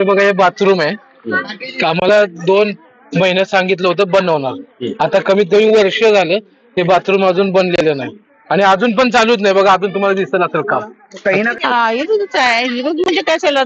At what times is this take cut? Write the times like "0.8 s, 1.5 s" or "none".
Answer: 11.5 s

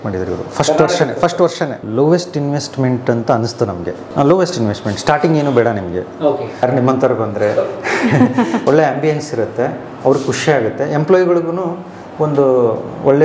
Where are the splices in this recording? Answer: 1.8 s, 4.0 s, 6.6 s, 8.6 s

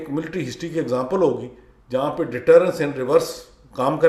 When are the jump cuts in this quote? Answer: none

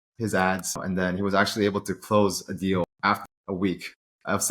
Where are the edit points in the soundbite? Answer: 0.8 s, 3.1 s

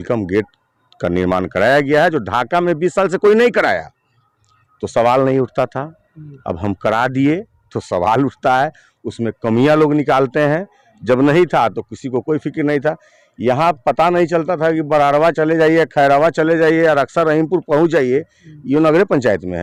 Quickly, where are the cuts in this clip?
none

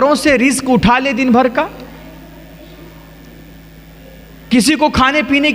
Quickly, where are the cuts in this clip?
none

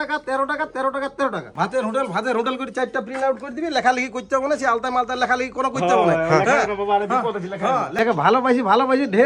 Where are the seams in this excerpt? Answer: 1.5 s, 7.9 s

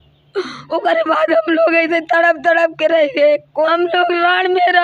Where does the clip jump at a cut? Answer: 3.7 s

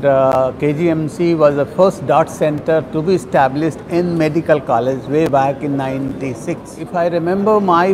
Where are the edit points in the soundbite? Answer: 6.7 s

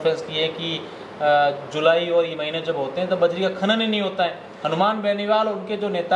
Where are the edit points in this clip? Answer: none

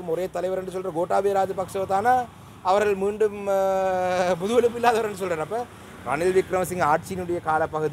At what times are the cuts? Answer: none

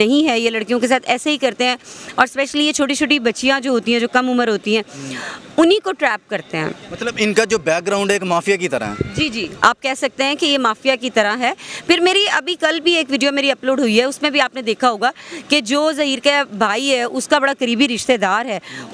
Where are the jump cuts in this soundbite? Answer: none

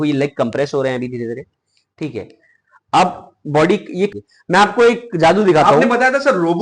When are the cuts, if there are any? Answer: 4.1 s

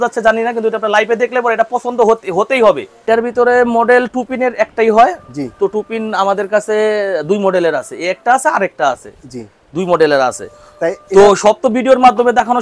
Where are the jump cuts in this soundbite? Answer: 2.9 s

